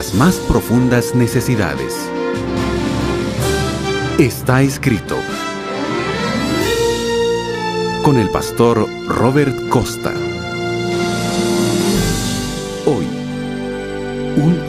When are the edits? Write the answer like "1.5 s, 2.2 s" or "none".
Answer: 4.3 s